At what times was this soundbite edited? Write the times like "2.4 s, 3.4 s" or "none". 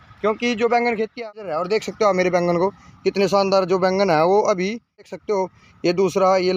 1.2 s, 5.1 s